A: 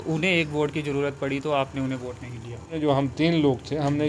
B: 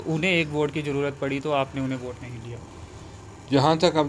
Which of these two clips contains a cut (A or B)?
A